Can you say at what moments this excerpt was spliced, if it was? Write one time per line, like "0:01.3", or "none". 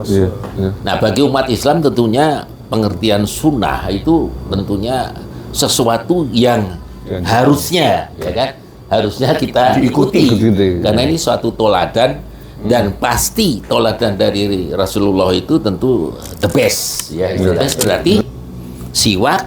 0:17.7